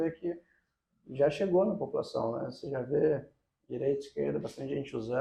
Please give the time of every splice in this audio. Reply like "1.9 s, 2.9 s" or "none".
none